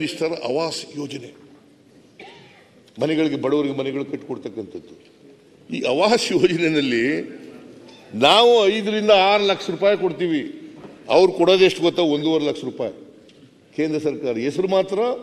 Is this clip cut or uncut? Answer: uncut